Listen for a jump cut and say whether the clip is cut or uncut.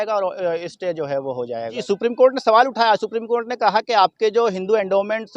cut